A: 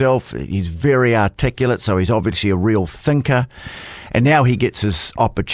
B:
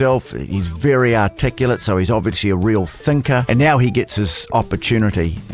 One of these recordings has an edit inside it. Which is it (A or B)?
B